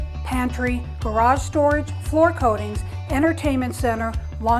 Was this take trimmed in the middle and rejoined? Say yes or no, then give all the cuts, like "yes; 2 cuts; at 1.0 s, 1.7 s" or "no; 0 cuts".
no; 0 cuts